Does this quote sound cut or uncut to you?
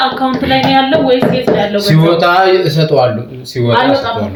uncut